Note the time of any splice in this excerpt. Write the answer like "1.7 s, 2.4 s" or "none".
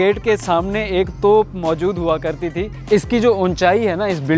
2.8 s